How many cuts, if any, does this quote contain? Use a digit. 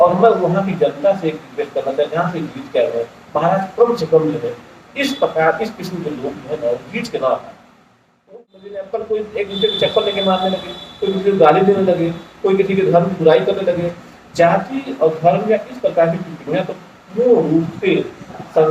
1